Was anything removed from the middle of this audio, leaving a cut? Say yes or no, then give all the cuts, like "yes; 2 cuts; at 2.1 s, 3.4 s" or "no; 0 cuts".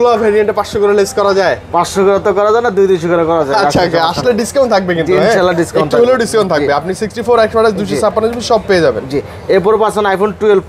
no; 0 cuts